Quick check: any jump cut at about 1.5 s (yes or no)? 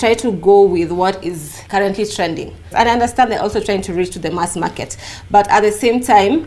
yes